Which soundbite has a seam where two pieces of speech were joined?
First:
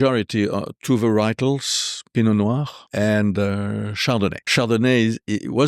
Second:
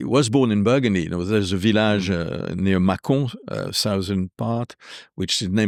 first; 2 cuts; at 2.8 s, 4.5 s

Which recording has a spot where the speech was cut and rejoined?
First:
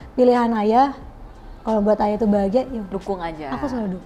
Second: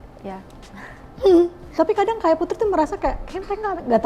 second; 1 cut; at 1.6 s

